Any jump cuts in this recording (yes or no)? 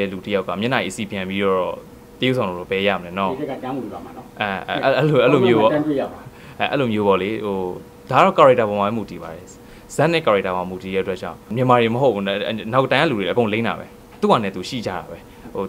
no